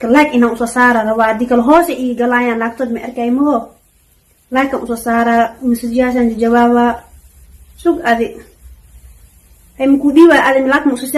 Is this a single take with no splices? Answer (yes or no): yes